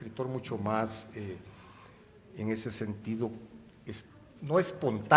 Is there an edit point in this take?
yes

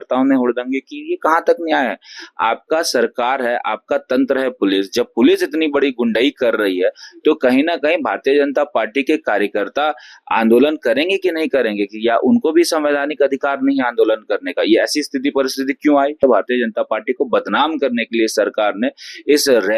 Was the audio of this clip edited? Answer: yes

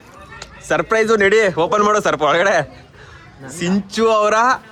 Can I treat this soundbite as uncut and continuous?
yes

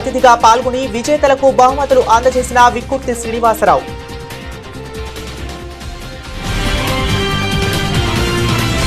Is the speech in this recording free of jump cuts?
no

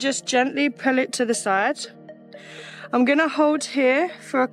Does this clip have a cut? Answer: no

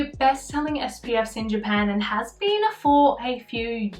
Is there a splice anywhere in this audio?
no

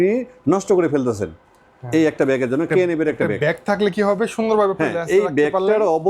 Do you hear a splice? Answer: no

